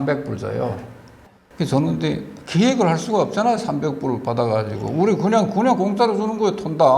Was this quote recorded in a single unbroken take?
no; 1 cut; at 1.1 s

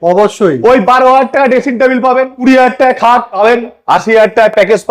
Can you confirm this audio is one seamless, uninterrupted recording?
no; 2 cuts; at 2.4 s, 3.3 s

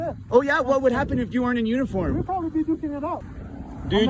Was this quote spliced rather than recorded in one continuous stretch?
yes; 1 cut; at 3.2 s

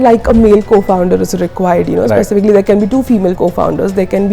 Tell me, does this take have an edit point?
yes; 1 cut; at 3.4 s

